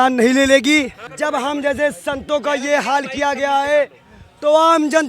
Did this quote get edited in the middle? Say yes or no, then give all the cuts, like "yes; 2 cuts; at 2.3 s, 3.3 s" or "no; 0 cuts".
yes; 1 cut; at 1.0 s